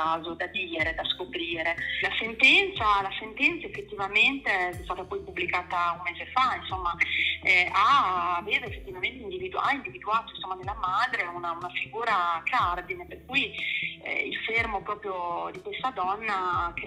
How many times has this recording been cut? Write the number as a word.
one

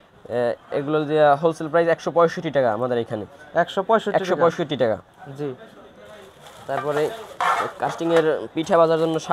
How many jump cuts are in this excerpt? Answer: zero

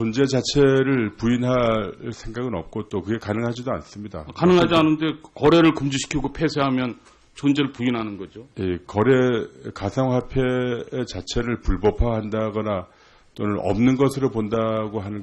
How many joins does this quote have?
zero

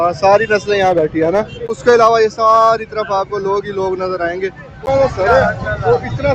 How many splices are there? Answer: two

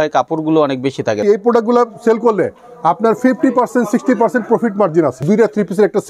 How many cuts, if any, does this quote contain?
two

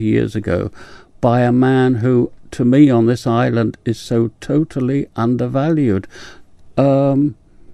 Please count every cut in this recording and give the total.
zero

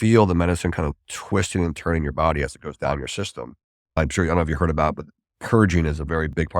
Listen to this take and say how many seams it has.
one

